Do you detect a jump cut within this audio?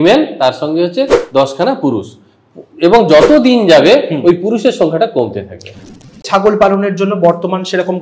yes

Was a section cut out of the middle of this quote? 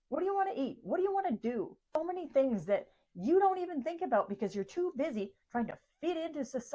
yes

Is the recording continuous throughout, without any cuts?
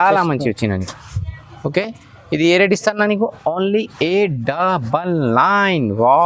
yes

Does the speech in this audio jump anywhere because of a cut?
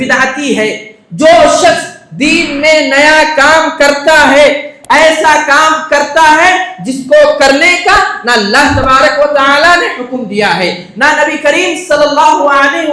no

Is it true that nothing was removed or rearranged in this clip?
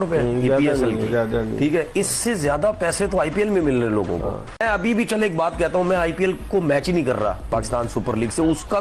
yes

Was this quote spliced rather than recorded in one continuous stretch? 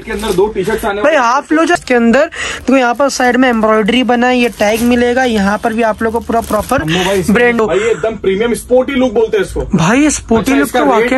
yes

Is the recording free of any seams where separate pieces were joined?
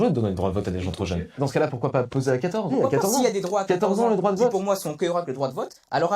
no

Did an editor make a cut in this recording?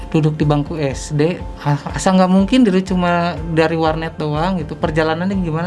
yes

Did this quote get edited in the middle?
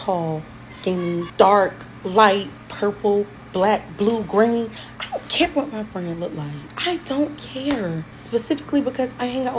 yes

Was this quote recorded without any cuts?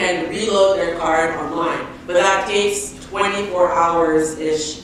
yes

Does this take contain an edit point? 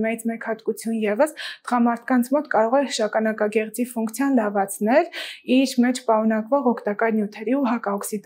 no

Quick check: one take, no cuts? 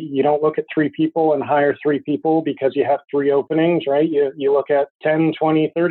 no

